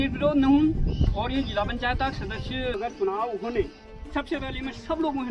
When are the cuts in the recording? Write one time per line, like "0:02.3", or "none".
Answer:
0:02.7